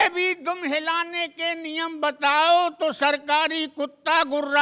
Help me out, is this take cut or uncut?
uncut